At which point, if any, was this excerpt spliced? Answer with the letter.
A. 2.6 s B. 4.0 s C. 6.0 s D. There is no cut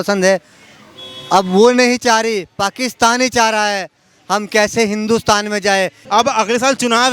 C